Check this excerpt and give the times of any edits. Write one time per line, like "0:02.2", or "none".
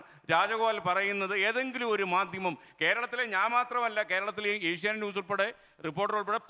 none